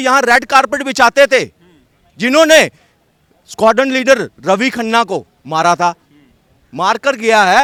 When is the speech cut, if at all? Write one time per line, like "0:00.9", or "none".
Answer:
none